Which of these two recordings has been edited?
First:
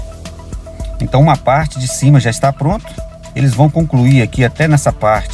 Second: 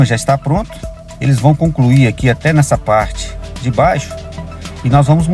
first; 1 cut; at 1.0 s

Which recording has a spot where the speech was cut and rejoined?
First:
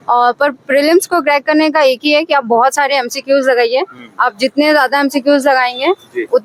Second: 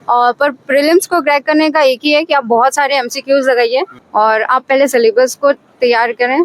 second; 1 cut; at 4.0 s

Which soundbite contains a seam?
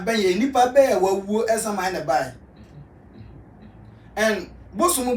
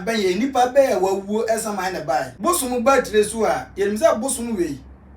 second; 1 cut; at 2.3 s

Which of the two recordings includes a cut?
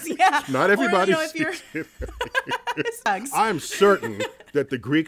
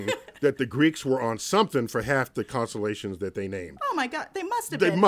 first; 1 cut; at 3.1 s

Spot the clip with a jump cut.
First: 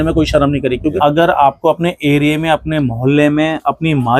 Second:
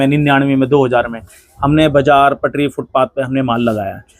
first; 1 cut; at 0.9 s

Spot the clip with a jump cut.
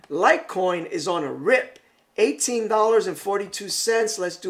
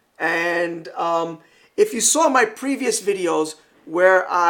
second; 1 cut; at 2.6 s

